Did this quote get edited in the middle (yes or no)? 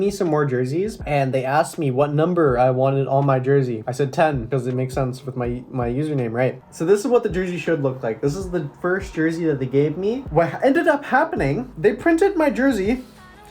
yes